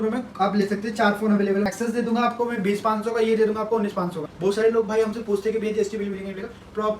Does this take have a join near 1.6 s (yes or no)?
yes